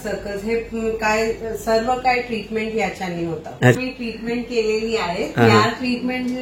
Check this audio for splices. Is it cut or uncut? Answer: cut